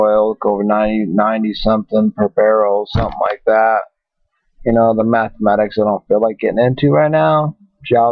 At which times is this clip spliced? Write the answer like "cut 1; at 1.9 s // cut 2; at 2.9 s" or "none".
cut 1; at 1.4 s